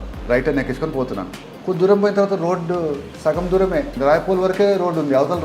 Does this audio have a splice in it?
yes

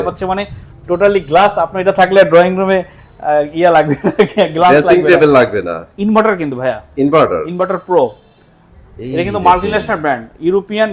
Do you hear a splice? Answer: no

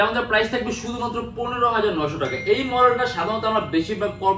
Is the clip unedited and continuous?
yes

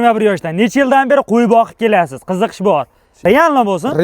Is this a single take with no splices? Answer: no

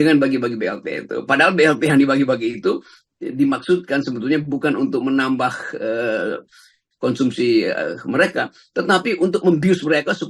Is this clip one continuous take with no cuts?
yes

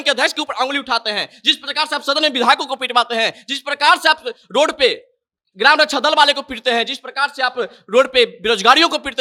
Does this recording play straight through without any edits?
yes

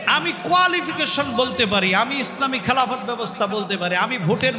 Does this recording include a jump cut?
no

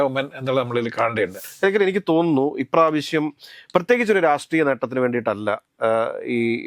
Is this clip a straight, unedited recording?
no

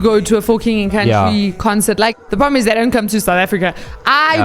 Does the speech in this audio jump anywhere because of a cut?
yes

